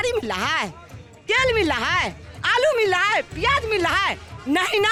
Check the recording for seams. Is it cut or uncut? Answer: uncut